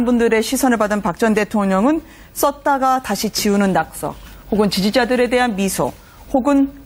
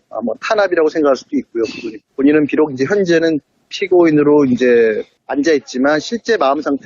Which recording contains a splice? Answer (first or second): second